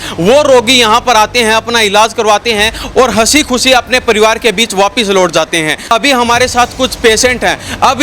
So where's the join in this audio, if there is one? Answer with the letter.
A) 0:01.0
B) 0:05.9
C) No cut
B